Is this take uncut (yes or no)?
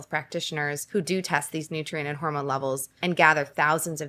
no